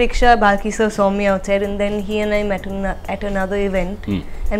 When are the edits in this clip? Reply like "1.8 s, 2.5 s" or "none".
none